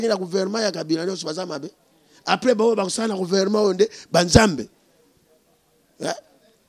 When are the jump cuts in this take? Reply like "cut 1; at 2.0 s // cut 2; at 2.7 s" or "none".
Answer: none

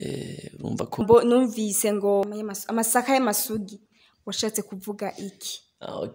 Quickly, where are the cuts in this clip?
cut 1; at 1.0 s // cut 2; at 2.3 s

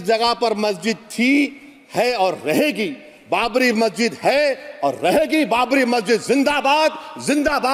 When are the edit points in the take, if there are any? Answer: none

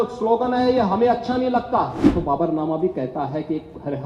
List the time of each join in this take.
cut 1; at 2.0 s

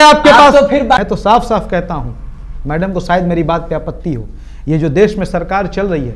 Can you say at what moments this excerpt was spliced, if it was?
cut 1; at 1.0 s

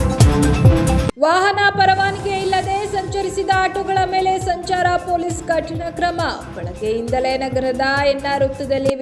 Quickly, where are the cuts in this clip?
cut 1; at 1.0 s

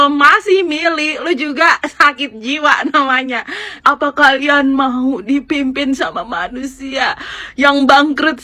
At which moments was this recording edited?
cut 1; at 3.8 s

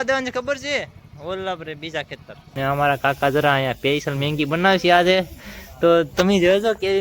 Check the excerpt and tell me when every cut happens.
cut 1; at 2.4 s

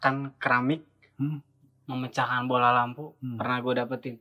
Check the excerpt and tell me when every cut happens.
none

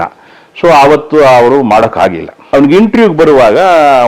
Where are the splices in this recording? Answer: cut 1; at 2.5 s

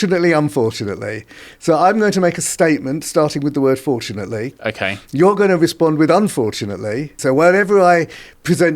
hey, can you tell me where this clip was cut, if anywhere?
cut 1; at 7.1 s

